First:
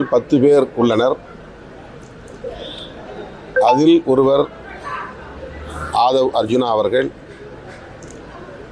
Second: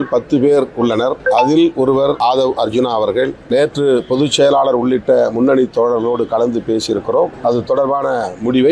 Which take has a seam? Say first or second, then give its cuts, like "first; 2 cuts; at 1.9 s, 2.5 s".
second; 4 cuts; at 1.2 s, 2.2 s, 3.4 s, 7.4 s